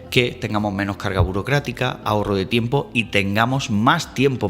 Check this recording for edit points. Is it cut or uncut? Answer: uncut